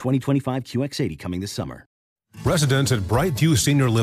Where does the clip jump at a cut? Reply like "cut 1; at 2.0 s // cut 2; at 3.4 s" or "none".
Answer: cut 1; at 2.0 s